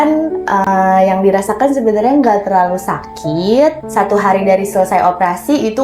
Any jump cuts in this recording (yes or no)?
yes